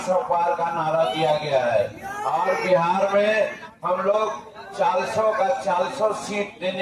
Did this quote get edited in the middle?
no; 0 cuts

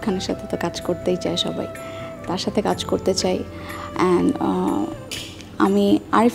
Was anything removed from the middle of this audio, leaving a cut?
no; 0 cuts

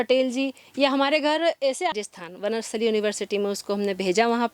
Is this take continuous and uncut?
no; 1 cut; at 2.0 s

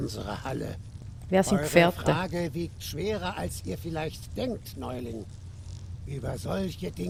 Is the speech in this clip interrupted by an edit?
no; 0 cuts

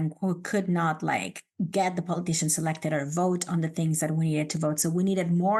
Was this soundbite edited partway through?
no; 0 cuts

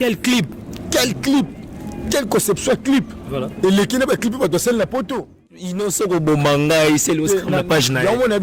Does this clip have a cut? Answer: yes; 1 cut; at 5.6 s

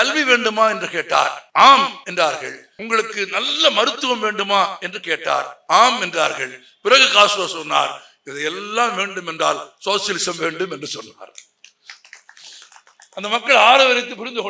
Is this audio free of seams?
no; 3 cuts; at 1.4 s, 2.2 s, 5.5 s

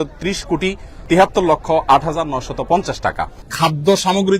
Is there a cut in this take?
yes; 1 cut; at 3.4 s

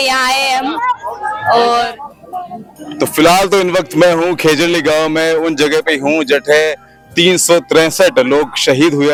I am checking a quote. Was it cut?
no; 0 cuts

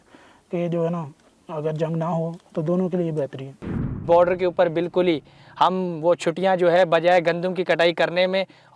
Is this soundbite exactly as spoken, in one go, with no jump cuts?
no; 1 cut; at 3.9 s

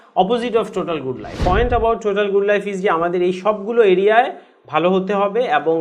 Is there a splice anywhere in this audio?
yes; 1 cut; at 1.3 s

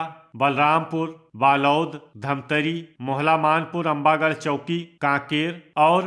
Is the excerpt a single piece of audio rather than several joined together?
yes; 0 cuts

